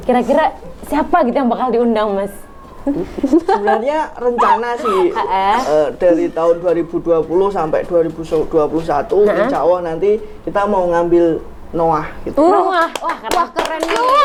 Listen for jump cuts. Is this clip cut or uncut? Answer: uncut